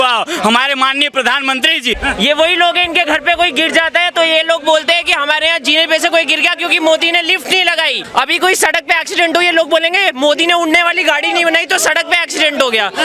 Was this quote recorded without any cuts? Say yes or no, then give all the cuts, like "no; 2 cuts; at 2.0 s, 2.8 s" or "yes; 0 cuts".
no; 2 cuts; at 2.0 s, 8.1 s